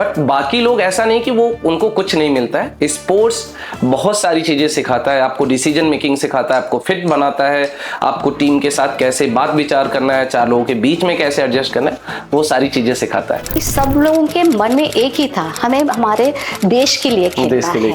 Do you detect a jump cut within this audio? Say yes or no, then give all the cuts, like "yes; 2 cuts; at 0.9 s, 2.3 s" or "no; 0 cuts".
yes; 1 cut; at 13.7 s